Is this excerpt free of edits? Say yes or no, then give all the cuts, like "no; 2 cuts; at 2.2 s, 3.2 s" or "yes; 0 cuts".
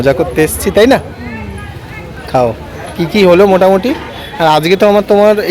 yes; 0 cuts